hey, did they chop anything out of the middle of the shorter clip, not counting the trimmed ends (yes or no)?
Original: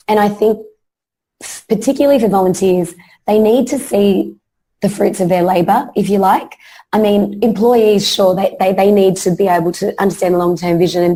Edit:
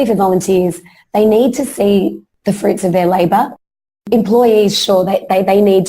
yes